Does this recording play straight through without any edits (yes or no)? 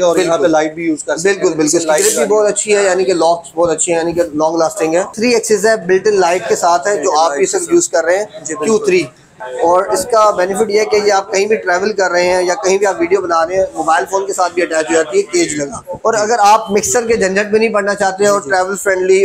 no